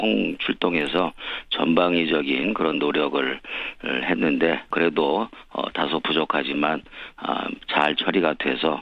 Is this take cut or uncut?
uncut